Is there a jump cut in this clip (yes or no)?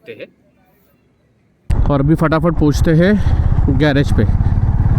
yes